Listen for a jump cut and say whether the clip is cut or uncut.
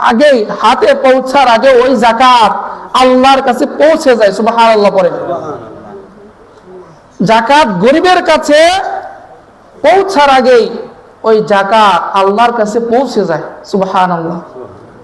uncut